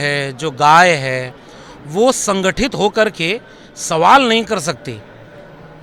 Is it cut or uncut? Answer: uncut